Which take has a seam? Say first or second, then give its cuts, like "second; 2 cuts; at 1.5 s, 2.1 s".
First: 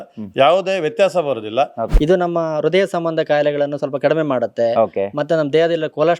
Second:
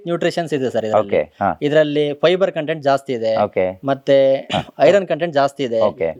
first; 1 cut; at 1.8 s